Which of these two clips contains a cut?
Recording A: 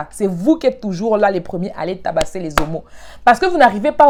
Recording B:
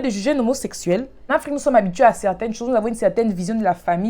B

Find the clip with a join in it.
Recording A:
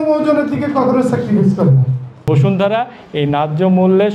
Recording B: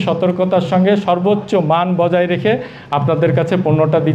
A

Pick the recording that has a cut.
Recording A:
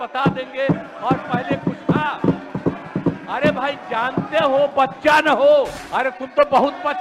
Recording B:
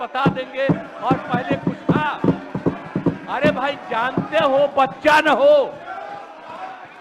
A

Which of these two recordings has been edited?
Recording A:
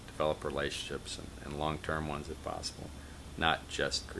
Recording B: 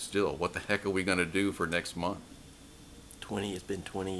B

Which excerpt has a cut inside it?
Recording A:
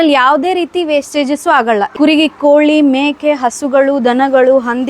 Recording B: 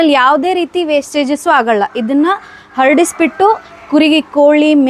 A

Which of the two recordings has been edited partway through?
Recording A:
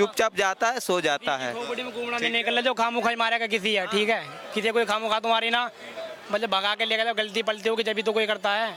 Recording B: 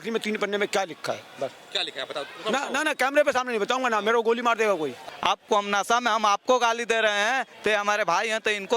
B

